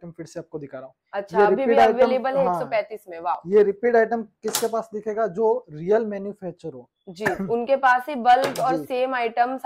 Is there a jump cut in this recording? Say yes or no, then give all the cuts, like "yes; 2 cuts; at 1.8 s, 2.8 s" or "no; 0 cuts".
no; 0 cuts